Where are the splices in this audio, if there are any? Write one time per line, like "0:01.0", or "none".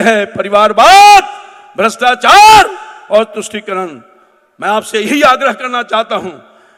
none